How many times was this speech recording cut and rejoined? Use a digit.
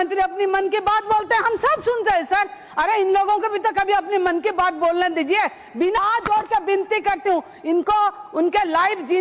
1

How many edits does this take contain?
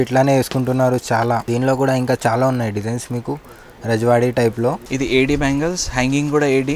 2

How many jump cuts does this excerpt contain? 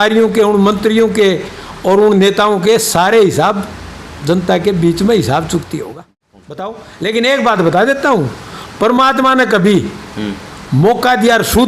1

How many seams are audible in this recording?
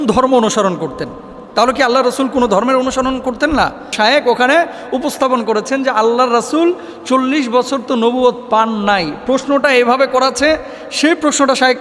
1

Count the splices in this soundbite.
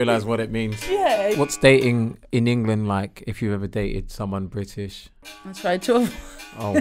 3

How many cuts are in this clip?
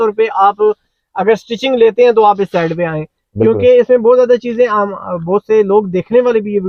0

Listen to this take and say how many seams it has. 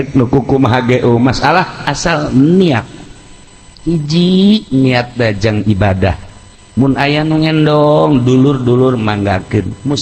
0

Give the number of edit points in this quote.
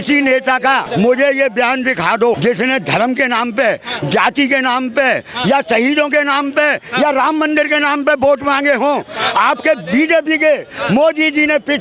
2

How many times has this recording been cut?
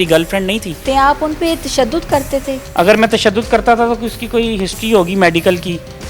2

